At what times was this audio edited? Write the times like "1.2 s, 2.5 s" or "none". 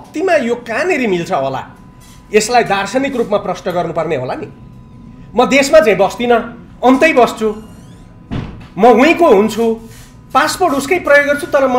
none